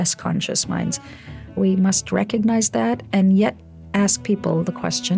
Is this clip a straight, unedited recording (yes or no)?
no